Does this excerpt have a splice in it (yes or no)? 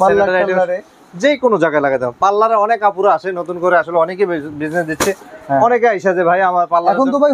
no